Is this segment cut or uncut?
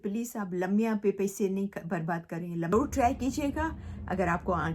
cut